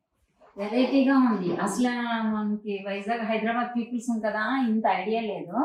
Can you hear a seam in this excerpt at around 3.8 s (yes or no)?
no